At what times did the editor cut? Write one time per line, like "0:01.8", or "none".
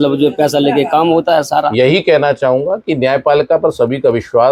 0:01.7